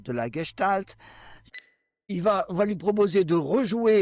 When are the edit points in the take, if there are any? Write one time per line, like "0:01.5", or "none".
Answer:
0:01.5